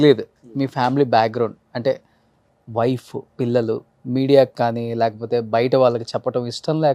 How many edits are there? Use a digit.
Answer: 1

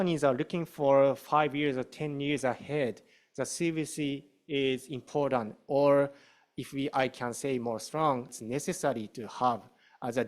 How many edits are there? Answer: 1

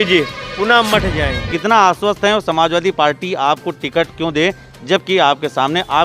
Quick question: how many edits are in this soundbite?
1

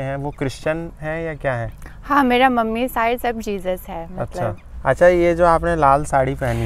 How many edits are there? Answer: 1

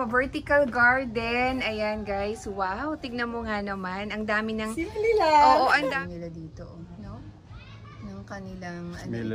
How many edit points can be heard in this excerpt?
1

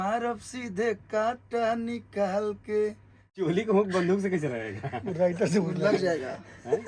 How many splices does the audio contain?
1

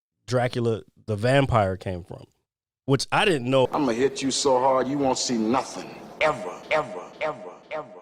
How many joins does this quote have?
1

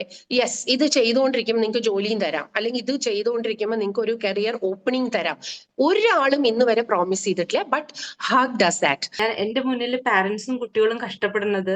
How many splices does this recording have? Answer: 1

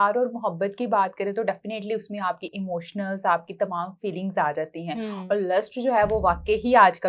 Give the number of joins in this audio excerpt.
0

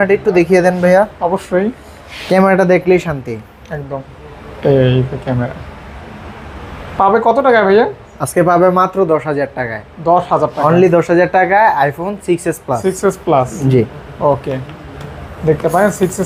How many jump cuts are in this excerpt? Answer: 0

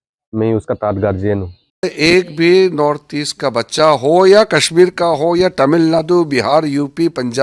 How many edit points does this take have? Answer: 1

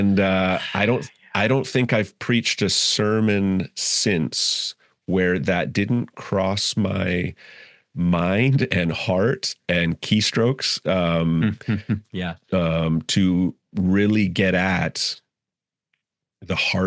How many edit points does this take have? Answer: 0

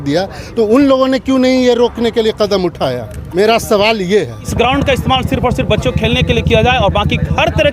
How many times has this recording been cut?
2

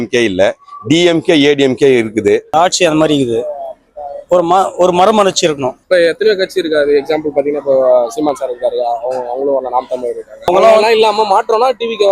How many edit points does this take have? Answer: 3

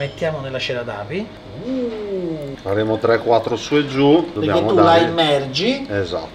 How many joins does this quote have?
3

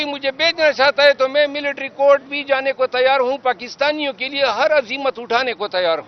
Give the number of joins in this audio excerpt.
0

